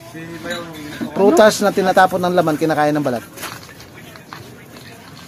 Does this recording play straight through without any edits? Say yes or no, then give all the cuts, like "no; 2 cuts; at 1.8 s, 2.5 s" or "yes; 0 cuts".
no; 1 cut; at 1.9 s